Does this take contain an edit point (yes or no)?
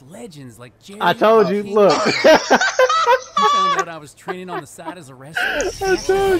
no